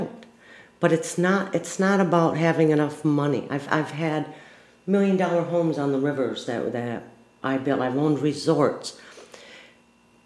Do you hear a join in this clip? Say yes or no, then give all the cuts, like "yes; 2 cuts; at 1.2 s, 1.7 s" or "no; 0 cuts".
no; 0 cuts